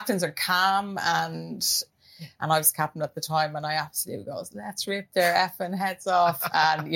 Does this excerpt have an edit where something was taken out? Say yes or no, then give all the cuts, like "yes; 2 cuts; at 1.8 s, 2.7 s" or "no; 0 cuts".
yes; 1 cut; at 1.9 s